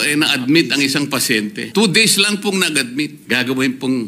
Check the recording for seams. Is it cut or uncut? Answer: cut